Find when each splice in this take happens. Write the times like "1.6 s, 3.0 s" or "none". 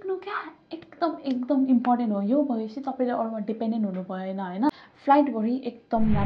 4.7 s